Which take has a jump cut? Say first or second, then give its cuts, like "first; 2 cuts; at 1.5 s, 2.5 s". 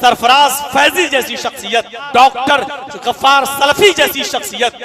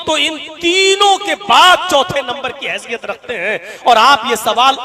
first; 1 cut; at 2.0 s